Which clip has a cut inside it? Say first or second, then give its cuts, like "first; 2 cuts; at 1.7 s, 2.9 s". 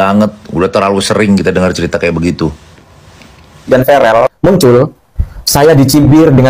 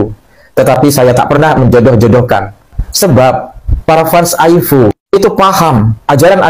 first; 1 cut; at 3.7 s